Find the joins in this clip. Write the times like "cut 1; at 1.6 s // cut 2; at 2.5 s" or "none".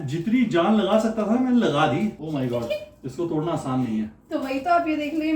cut 1; at 2.2 s